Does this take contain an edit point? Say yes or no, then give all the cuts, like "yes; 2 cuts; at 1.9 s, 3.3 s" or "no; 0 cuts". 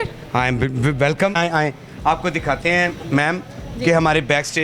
yes; 1 cut; at 1.3 s